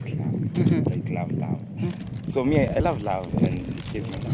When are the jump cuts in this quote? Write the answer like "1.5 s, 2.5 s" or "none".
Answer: none